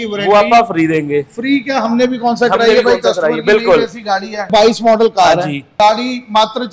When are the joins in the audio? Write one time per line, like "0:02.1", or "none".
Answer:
0:04.5
0:05.6